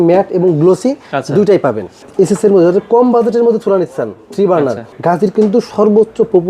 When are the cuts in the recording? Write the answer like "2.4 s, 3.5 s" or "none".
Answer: 2.0 s, 4.9 s